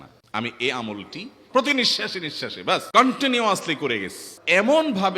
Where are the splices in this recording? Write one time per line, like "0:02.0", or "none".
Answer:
0:01.3
0:02.9
0:04.3